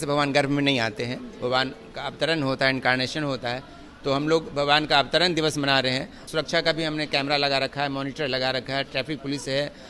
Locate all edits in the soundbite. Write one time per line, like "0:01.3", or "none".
0:06.2